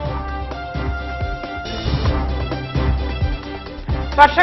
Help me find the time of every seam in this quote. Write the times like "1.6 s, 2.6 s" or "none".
none